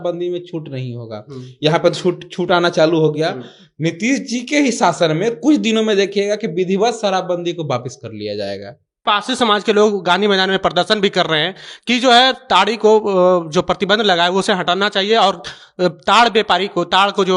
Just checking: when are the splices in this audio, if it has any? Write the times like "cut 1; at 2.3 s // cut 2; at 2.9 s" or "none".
cut 1; at 9.0 s